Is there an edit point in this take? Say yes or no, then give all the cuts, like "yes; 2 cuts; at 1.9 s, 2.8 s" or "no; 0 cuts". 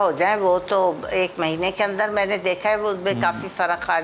no; 0 cuts